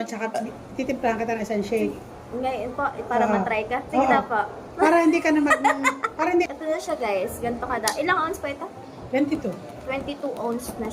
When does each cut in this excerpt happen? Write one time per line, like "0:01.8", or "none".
0:06.5